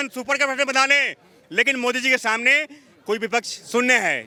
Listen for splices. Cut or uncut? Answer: uncut